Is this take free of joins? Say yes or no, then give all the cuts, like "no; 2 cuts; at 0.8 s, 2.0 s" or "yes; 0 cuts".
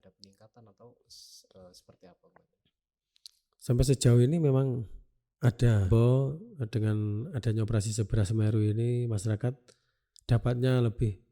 no; 1 cut; at 6.1 s